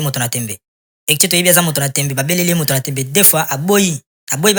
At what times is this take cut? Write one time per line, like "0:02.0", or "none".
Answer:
none